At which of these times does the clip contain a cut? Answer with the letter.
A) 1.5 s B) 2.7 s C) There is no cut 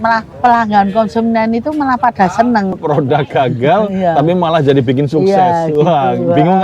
B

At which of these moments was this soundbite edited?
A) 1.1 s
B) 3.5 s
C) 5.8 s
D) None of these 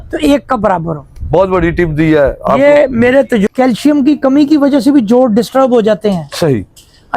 B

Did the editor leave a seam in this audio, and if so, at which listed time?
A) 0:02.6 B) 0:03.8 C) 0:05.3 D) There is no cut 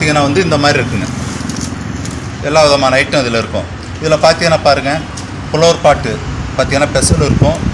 D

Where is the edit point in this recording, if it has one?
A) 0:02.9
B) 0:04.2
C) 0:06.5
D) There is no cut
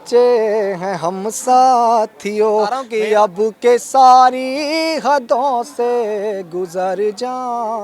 A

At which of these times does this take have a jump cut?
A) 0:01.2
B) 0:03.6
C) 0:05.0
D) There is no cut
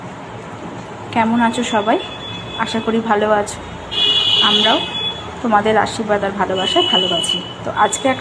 C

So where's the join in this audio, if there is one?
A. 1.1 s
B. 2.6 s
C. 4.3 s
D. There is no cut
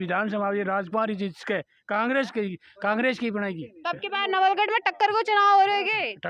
D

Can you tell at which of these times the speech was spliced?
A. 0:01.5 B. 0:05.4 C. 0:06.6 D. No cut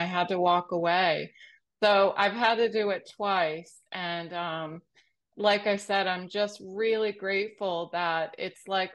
D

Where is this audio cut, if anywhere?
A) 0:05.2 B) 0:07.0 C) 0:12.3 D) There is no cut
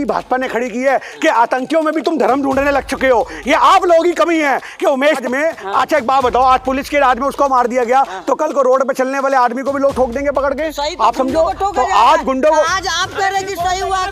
A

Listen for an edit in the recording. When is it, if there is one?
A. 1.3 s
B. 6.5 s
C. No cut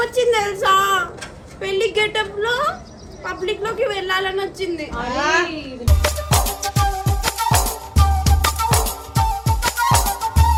C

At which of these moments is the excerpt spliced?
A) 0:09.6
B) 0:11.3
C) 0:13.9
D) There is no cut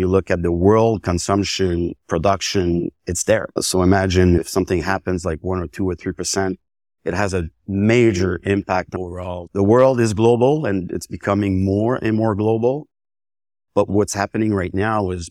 C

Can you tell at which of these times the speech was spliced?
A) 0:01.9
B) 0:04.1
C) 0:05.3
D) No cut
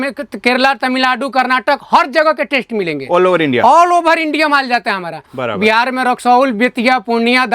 D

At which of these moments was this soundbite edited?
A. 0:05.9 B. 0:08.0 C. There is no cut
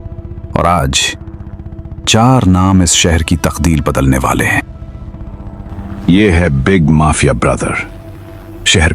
A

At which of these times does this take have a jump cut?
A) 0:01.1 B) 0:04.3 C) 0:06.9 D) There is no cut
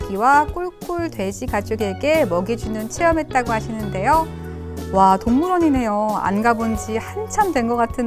D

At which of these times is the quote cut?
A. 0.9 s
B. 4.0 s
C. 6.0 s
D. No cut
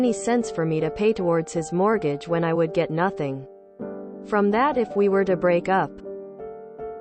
C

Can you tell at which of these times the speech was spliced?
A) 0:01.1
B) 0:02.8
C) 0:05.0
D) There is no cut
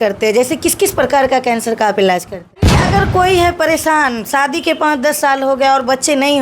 B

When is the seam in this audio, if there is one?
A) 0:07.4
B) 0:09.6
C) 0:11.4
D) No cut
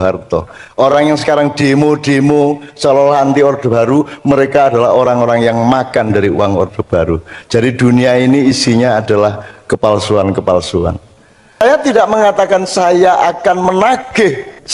C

